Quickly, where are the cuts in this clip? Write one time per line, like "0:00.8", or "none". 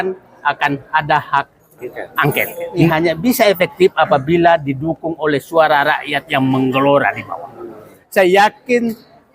0:02.9
0:08.0